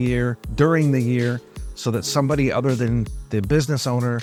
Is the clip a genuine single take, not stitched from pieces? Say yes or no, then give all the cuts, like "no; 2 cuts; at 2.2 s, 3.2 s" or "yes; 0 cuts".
yes; 0 cuts